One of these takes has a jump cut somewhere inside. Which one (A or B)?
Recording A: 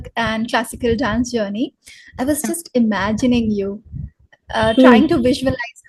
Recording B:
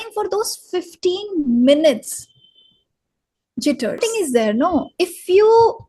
B